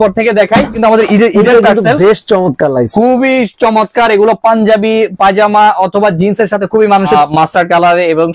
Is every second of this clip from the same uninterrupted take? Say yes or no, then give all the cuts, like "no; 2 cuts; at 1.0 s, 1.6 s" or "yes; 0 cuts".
no; 2 cuts; at 0.8 s, 7.2 s